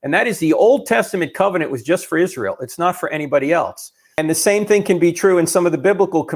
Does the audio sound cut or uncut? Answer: cut